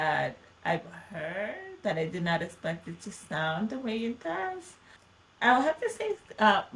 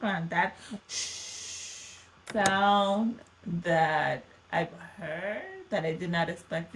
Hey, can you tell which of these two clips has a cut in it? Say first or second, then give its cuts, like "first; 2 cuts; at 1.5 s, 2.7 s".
second; 1 cut; at 2.2 s